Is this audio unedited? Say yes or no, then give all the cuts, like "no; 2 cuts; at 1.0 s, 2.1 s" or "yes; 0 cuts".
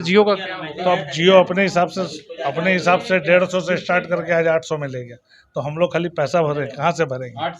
yes; 0 cuts